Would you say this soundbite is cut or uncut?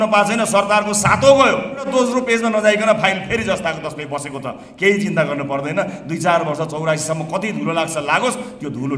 cut